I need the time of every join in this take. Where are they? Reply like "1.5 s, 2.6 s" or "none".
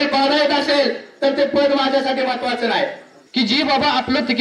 3.1 s